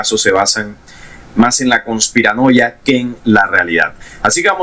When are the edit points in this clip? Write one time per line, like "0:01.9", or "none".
none